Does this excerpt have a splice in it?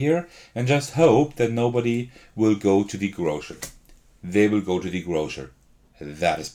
no; 0 cuts

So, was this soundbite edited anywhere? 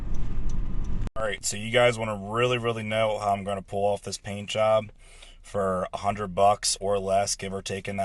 yes; 1 cut; at 1.1 s

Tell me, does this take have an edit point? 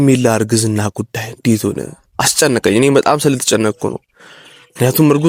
no; 0 cuts

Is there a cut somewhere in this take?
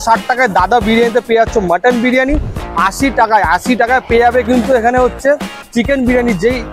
yes; 1 cut; at 2.7 s

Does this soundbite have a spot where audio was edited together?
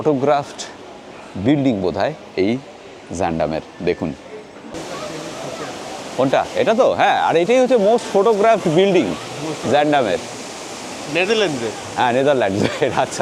no; 0 cuts

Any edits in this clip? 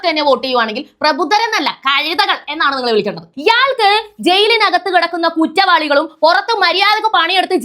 yes; 1 cut; at 3.3 s

